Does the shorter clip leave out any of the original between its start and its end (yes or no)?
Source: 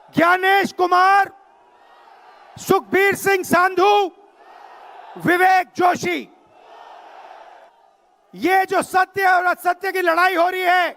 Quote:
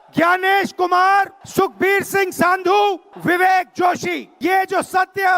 yes